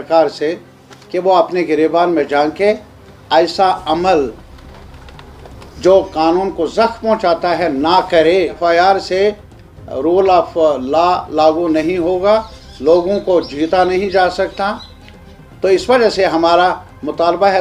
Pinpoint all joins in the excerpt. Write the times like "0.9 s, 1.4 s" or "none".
8.6 s